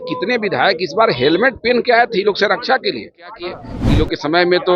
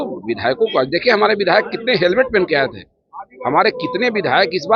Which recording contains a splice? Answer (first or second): first